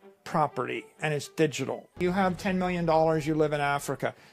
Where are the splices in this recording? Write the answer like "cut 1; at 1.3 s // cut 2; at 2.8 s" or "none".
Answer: cut 1; at 1.9 s